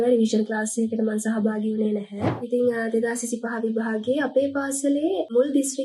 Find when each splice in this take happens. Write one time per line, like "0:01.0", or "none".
0:02.4